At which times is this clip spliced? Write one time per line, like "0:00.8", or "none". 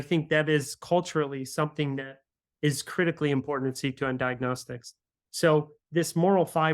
0:05.8